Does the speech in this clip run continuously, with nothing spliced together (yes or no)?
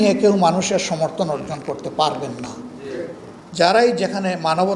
no